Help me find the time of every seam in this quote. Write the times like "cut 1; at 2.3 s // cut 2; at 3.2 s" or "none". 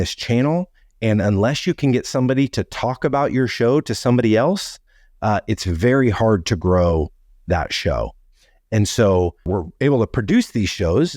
cut 1; at 9.5 s